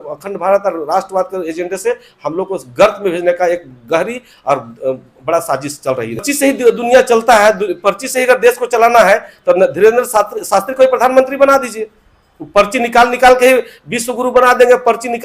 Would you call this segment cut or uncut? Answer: cut